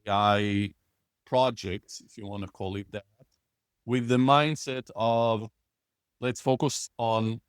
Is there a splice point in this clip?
no; 0 cuts

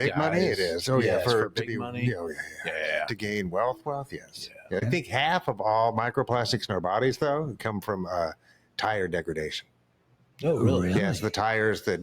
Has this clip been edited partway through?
yes; 1 cut; at 4.8 s

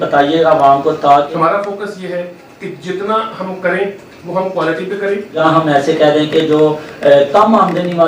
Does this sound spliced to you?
yes; 2 cuts; at 1.3 s, 5.4 s

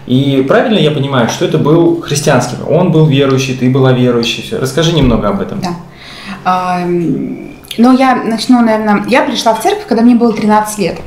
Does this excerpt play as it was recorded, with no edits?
yes; 0 cuts

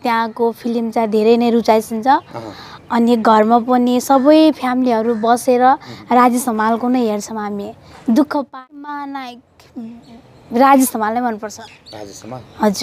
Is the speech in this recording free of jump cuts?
no; 1 cut; at 8.5 s

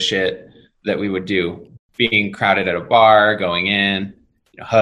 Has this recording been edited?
yes; 1 cut; at 1.7 s

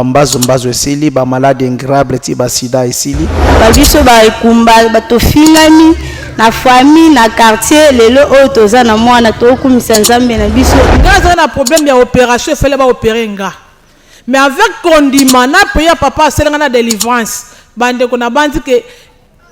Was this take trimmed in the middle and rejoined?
yes; 2 cuts; at 3.6 s, 10.9 s

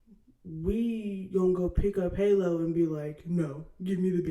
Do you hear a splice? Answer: no; 0 cuts

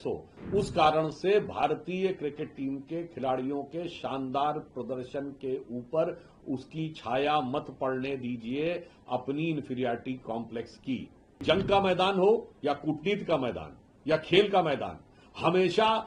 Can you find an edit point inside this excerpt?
yes; 1 cut; at 11.4 s

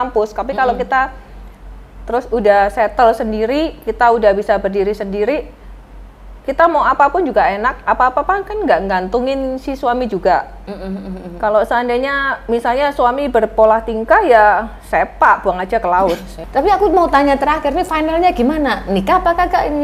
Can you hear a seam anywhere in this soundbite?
yes; 1 cut; at 16.3 s

